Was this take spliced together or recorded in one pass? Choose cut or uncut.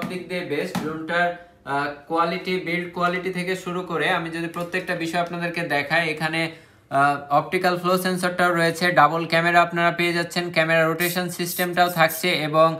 uncut